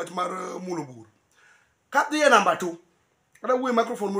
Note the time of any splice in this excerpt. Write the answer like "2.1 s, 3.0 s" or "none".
none